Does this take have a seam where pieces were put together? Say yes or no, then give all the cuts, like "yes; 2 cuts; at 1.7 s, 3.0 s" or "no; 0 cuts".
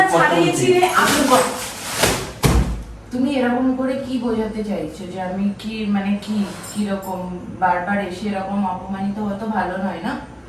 no; 0 cuts